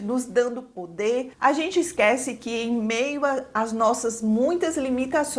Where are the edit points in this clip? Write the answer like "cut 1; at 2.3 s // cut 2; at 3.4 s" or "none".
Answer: cut 1; at 1.3 s